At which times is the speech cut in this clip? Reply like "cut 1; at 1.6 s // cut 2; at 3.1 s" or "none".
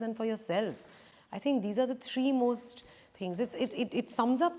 none